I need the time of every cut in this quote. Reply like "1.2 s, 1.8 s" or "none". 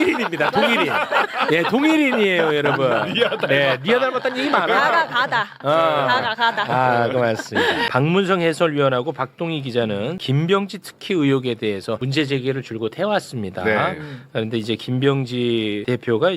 7.9 s